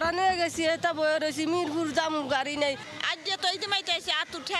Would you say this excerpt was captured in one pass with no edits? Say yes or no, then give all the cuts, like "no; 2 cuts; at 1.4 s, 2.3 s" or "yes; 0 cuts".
yes; 0 cuts